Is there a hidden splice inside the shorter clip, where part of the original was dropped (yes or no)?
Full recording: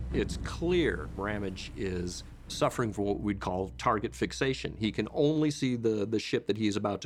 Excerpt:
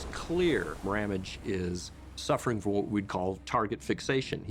no